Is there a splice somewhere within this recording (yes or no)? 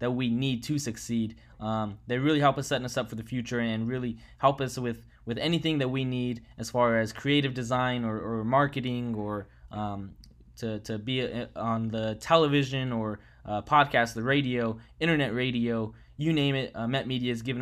no